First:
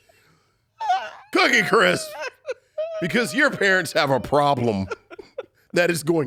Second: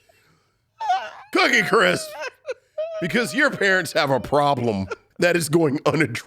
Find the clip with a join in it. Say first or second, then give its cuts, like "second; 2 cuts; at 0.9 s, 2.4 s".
second; 1 cut; at 5.0 s